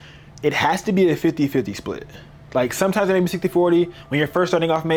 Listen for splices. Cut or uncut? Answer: uncut